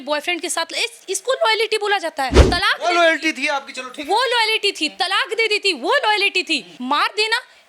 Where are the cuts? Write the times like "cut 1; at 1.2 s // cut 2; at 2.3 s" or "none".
cut 1; at 2.4 s // cut 2; at 6.7 s